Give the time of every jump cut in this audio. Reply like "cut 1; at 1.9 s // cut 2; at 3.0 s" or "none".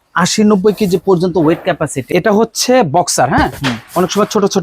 cut 1; at 2.1 s